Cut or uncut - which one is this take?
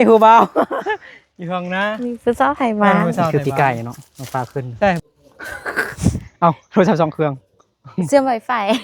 cut